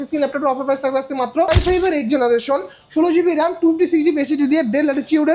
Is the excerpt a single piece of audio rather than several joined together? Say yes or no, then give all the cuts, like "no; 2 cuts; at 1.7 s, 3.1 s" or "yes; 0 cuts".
no; 1 cut; at 1.5 s